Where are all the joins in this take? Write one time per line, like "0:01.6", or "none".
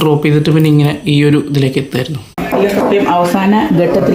0:02.3